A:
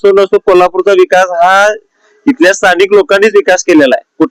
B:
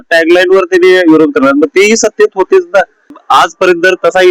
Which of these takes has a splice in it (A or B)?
B